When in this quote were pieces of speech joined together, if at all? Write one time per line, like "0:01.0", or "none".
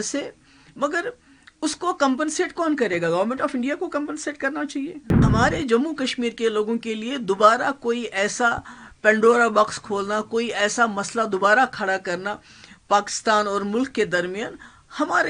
0:05.2